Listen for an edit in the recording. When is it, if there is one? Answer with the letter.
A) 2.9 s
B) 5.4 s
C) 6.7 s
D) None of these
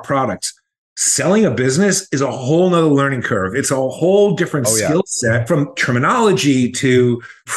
B